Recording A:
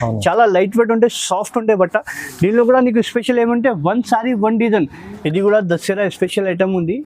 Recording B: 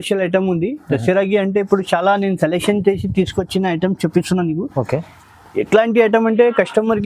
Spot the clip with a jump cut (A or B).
A